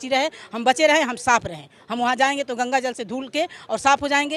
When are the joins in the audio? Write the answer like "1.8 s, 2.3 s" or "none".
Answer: none